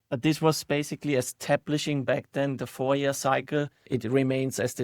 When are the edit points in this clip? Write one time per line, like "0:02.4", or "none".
0:03.9